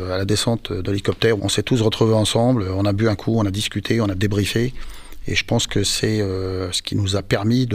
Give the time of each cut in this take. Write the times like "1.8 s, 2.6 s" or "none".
1.4 s